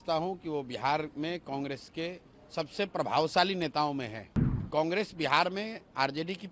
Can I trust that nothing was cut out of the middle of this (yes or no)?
no